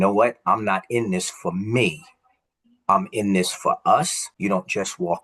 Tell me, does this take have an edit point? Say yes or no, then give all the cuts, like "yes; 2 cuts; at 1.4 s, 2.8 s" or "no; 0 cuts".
yes; 1 cut; at 4.2 s